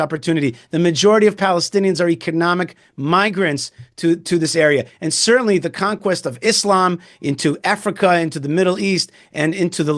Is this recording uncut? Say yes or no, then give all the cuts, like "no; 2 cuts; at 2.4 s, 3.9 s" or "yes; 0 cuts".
yes; 0 cuts